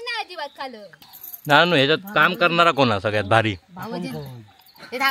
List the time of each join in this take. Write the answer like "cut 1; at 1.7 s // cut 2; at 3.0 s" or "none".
cut 1; at 0.9 s